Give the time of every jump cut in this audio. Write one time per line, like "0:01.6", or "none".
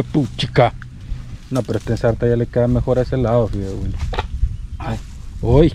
none